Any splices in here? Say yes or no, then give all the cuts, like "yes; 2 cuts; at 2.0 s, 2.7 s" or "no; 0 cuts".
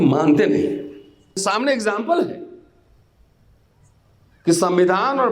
yes; 1 cut; at 1.4 s